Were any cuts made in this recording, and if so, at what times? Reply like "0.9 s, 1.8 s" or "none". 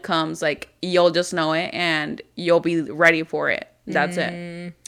none